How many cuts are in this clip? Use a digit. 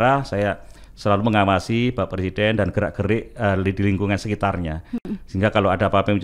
0